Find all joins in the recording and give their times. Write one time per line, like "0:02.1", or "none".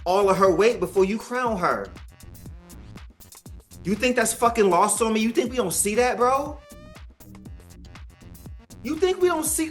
none